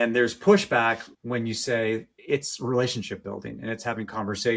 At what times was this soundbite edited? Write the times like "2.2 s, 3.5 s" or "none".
1.1 s, 2.1 s